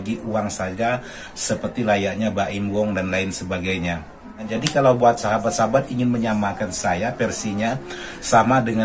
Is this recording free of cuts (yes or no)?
no